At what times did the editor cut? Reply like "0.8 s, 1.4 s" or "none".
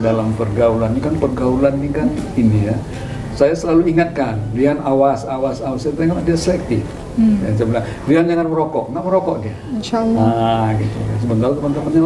none